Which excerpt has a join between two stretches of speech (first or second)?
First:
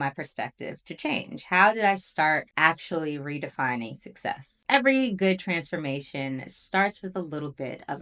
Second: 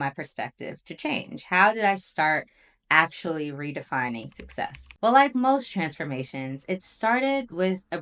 first